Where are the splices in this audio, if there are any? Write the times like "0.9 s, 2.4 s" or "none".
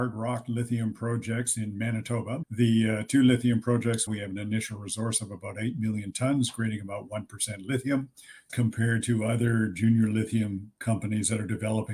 2.4 s, 8.5 s